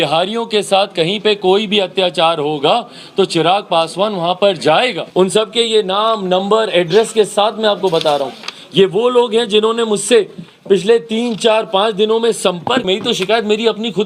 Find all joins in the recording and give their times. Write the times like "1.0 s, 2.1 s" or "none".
5.0 s, 12.8 s

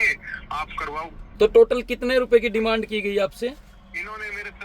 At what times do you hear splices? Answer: 1.2 s

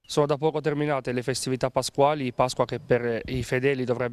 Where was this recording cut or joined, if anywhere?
none

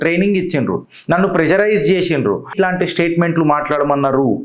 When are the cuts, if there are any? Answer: 2.5 s

